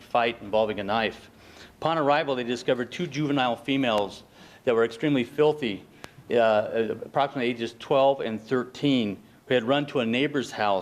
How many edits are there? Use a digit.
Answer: 1